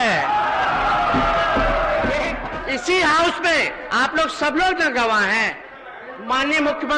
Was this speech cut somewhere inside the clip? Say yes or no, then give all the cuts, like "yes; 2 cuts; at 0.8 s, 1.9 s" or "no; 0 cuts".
yes; 1 cut; at 2.4 s